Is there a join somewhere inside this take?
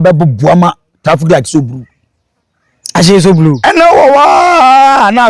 no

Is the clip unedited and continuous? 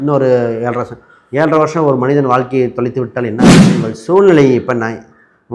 no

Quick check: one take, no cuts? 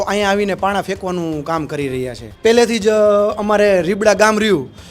no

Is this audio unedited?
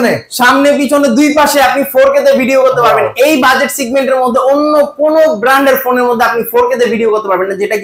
yes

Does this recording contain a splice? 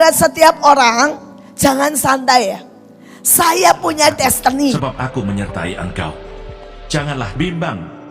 yes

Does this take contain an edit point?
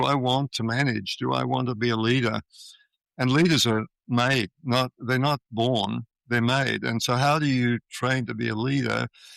no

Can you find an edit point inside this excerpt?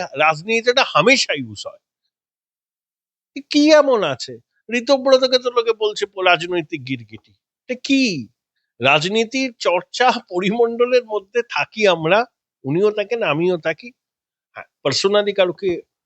no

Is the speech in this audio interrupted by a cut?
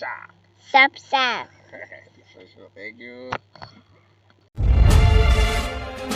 no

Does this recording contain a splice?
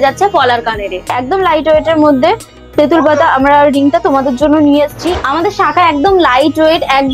yes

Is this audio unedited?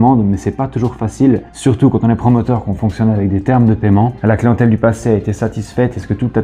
no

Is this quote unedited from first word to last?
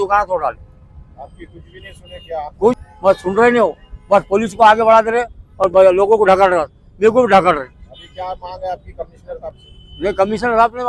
no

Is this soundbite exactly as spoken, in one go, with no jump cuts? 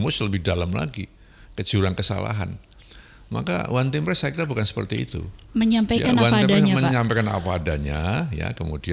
yes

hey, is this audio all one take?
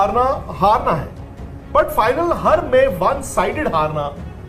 yes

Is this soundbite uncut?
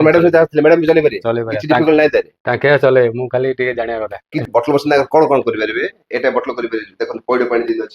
no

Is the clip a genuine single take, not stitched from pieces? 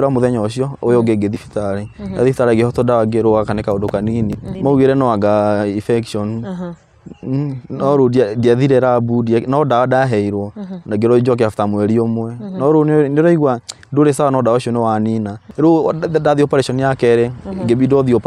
no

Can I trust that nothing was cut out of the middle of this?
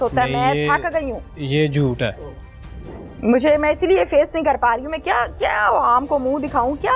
yes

